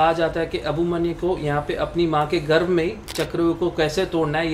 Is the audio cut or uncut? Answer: uncut